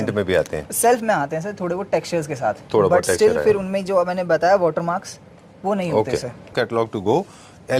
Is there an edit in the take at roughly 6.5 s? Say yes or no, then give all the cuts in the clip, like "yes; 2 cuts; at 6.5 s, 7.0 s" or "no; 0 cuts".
yes; 1 cut; at 6.5 s